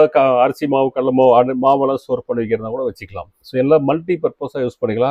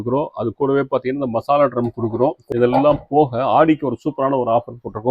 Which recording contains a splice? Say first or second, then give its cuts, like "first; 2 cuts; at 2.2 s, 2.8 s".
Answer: second; 1 cut; at 2.4 s